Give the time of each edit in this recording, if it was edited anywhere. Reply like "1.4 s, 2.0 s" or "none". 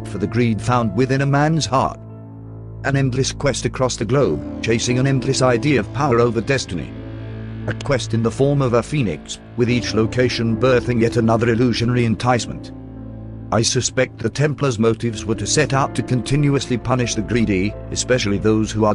8.9 s